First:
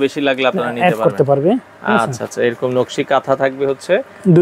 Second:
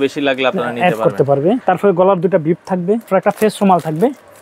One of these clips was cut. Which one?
second; 2 cuts; at 1.6 s, 3.1 s

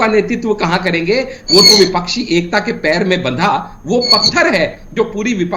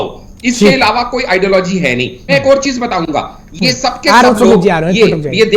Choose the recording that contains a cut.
second; 1 cut; at 2.2 s

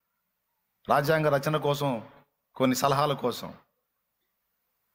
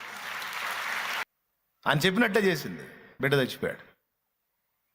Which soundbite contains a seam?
second; 1 cut; at 1.2 s

